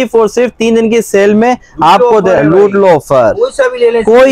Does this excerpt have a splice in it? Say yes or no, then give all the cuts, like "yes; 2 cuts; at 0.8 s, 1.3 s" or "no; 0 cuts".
no; 0 cuts